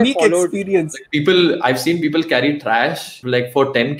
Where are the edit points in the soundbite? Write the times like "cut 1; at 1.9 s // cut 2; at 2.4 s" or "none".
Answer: cut 1; at 1.0 s // cut 2; at 3.1 s

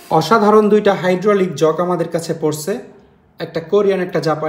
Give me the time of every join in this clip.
none

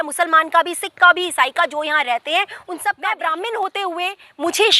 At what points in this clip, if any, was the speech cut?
cut 1; at 2.7 s

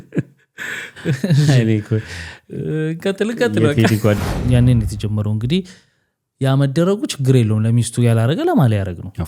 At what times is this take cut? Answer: cut 1; at 4.2 s

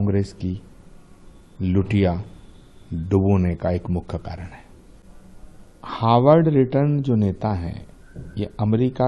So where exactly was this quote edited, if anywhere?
cut 1; at 5.1 s

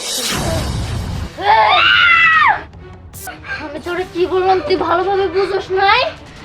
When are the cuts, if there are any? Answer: cut 1; at 3.2 s

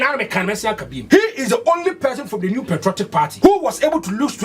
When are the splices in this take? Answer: cut 1; at 0.9 s // cut 2; at 3.3 s

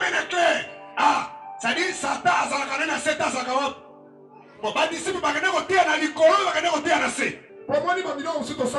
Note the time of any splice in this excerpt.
cut 1; at 7.6 s

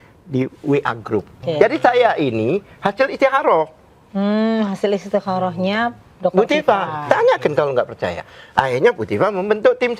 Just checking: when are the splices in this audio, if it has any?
cut 1; at 1.3 s

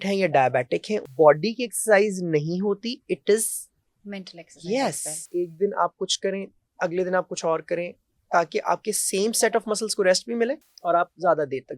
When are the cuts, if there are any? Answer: cut 1; at 1.0 s // cut 2; at 5.1 s // cut 3; at 10.7 s

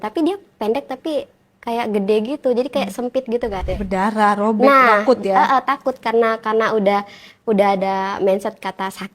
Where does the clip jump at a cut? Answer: cut 1; at 3.6 s

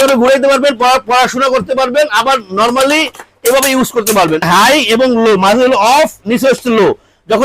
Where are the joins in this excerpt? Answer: cut 1; at 4.4 s

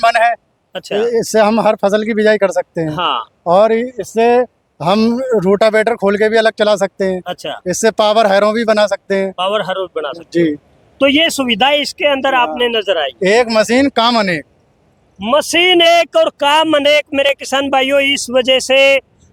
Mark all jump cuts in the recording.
none

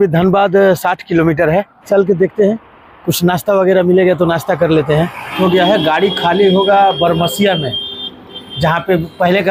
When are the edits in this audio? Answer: cut 1; at 1.8 s // cut 2; at 5.3 s

